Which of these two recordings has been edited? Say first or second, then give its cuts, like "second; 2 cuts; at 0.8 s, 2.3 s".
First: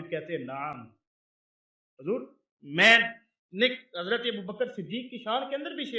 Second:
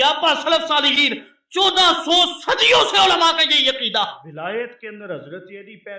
second; 1 cut; at 4.3 s